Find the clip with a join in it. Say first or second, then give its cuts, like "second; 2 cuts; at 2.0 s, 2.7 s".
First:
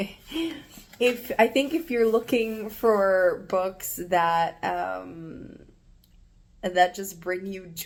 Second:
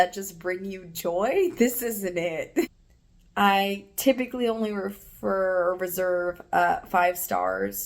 second; 1 cut; at 2.7 s